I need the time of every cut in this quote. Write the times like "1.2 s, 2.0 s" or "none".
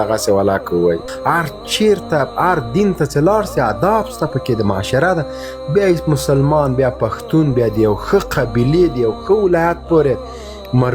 1.1 s